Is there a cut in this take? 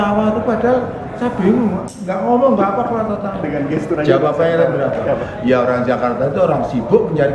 no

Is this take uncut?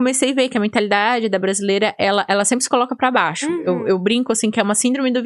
yes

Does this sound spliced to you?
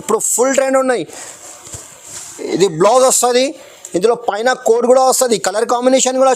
no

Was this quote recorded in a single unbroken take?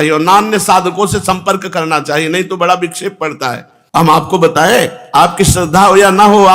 no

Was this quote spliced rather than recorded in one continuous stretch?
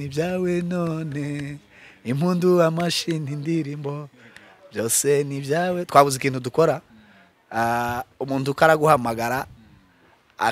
no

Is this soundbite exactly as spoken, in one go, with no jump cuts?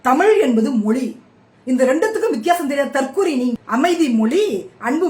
no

